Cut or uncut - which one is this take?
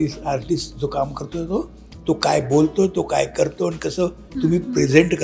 uncut